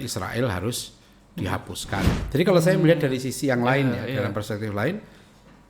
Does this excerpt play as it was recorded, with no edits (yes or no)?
no